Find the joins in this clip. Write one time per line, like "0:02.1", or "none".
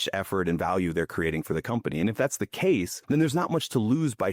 0:02.9